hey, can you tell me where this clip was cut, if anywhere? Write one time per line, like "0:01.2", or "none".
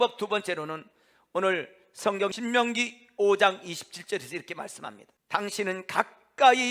0:02.4
0:05.1